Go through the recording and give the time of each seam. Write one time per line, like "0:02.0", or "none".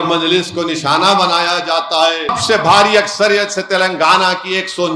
0:02.3